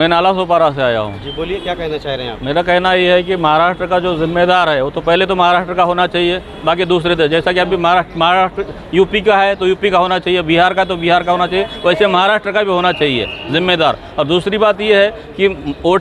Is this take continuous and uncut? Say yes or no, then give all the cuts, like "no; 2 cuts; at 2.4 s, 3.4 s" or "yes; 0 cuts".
yes; 0 cuts